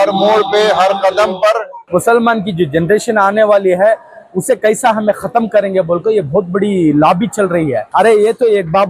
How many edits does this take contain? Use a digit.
2